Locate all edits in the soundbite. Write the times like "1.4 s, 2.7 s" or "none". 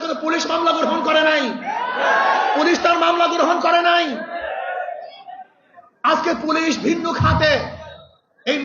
none